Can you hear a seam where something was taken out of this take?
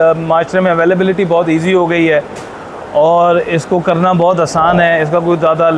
no; 0 cuts

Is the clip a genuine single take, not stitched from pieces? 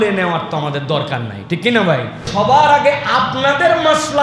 no; 1 cut; at 2.3 s

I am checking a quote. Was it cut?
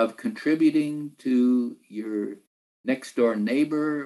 no; 0 cuts

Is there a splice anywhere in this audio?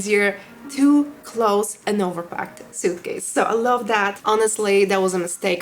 yes; 2 cuts; at 1.8 s, 4.2 s

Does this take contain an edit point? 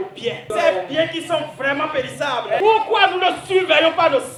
no; 0 cuts

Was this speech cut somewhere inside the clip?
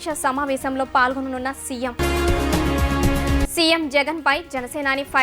no; 0 cuts

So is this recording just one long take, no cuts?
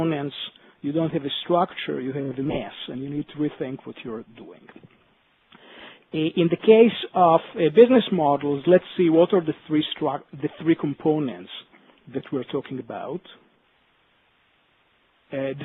yes; 0 cuts

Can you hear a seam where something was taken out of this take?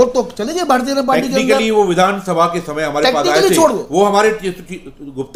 no; 0 cuts

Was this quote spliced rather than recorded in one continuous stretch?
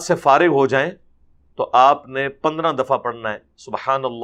no; 0 cuts

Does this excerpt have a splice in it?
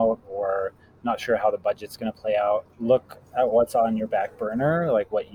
yes; 1 cut; at 2.7 s

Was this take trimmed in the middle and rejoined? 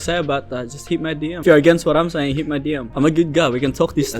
yes; 2 cuts; at 1.4 s, 2.9 s

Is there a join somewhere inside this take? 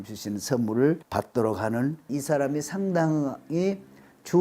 yes; 2 cuts; at 1.0 s, 2.1 s

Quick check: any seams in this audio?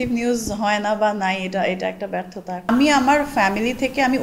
yes; 1 cut; at 2.7 s

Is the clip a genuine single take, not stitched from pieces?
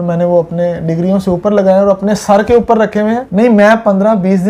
no; 1 cut; at 3.2 s

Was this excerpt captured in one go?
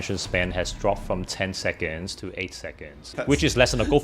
no; 1 cut; at 3.1 s

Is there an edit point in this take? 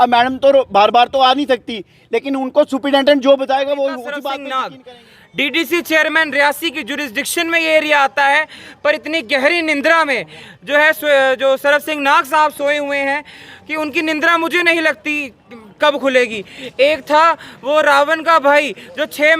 yes; 1 cut; at 4.7 s

